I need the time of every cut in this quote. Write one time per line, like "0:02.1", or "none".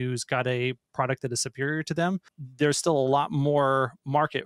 0:02.4